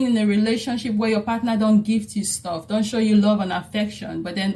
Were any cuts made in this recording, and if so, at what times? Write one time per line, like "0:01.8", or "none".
none